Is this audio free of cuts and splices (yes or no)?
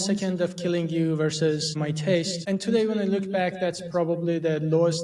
no